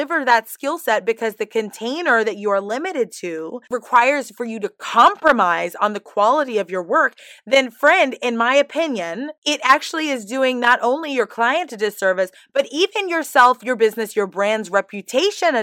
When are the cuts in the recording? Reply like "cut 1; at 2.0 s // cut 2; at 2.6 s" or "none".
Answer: cut 1; at 3.6 s // cut 2; at 9.3 s